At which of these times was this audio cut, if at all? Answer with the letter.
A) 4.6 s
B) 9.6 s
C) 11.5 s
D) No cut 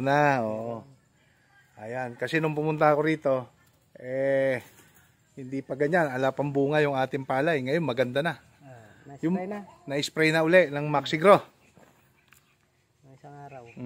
D